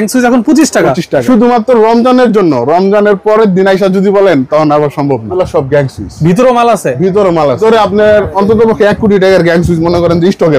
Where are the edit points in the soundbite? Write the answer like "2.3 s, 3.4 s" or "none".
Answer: 1.2 s, 5.3 s, 7.6 s